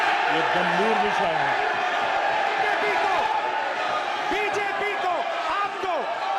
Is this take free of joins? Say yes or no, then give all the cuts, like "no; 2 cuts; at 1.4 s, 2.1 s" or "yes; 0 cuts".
yes; 0 cuts